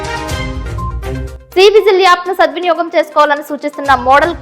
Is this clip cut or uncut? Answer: cut